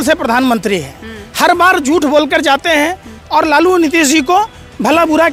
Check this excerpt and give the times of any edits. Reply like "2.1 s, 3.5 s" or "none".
none